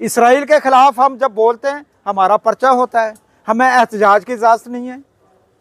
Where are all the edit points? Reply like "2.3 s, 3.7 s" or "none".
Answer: none